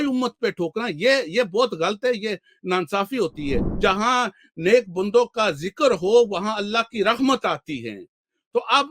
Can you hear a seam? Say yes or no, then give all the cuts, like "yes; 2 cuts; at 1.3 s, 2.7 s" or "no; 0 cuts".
yes; 1 cut; at 3.7 s